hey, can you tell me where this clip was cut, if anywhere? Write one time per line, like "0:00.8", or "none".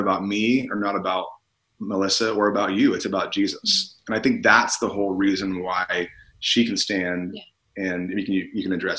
none